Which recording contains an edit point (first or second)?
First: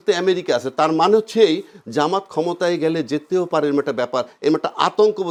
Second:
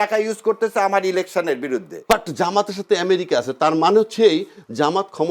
second